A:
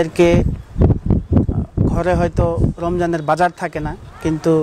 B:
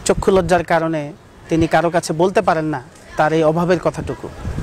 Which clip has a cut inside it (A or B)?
B